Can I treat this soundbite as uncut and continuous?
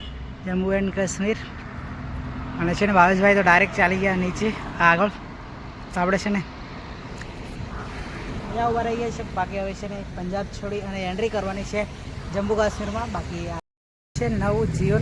no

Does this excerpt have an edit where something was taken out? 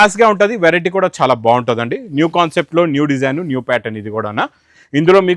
no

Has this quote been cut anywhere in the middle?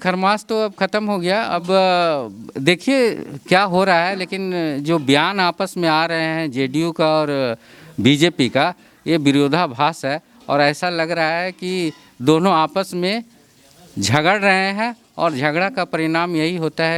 no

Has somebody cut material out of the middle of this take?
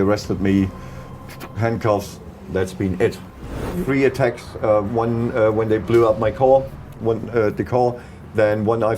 yes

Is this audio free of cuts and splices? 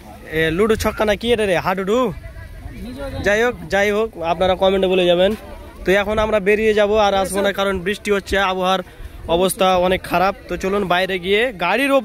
yes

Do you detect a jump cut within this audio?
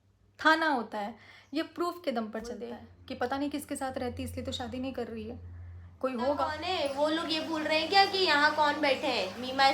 yes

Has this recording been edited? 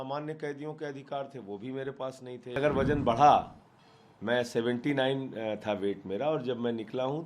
yes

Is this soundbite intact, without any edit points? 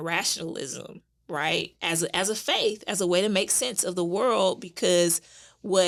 yes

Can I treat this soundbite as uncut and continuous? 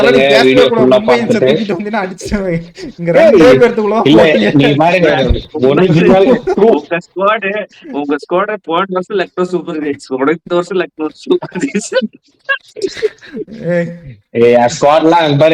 yes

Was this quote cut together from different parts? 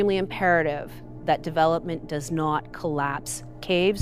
no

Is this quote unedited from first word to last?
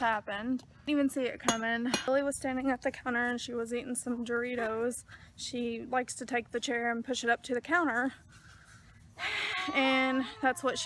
yes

